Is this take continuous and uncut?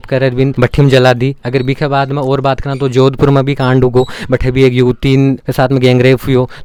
yes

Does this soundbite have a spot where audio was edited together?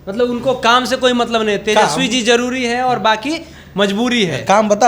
no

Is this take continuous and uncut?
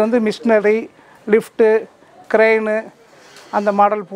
yes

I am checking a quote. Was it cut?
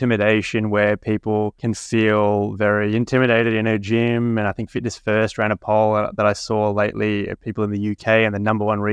yes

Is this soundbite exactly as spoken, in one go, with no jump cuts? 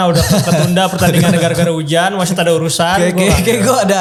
yes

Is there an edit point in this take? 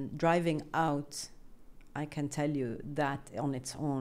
no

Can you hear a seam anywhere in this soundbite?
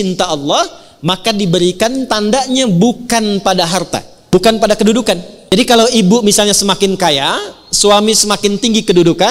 yes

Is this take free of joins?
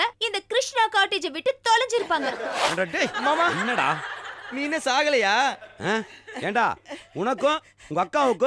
no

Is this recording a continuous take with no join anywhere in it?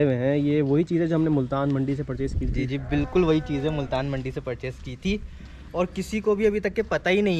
yes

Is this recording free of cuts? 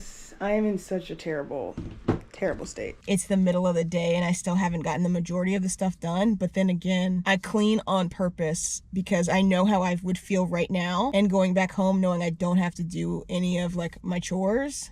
no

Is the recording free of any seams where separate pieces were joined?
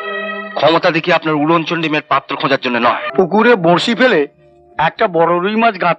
no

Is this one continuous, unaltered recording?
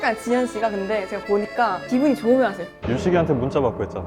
no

